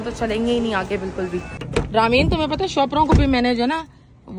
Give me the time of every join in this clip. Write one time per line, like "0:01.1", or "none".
0:01.6